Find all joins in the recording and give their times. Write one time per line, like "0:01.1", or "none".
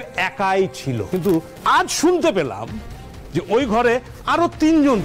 0:01.1